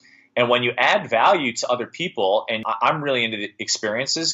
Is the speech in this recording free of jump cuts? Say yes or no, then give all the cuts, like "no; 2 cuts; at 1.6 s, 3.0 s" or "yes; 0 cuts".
no; 1 cut; at 2.7 s